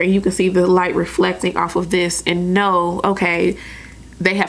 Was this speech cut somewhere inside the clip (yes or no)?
no